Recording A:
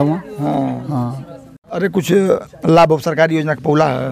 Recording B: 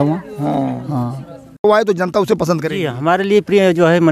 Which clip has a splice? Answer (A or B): B